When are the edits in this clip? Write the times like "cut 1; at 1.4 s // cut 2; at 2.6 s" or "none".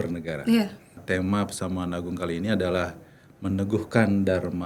cut 1; at 1.0 s

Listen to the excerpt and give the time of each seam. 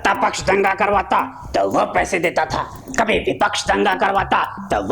cut 1; at 2.8 s

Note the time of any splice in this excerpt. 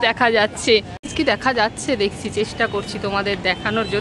cut 1; at 1.1 s

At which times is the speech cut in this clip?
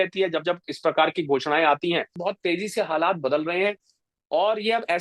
cut 1; at 2.2 s

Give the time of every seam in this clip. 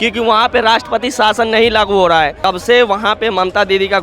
cut 1; at 2.4 s

